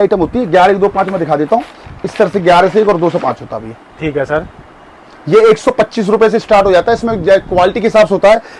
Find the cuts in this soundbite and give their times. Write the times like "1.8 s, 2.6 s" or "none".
none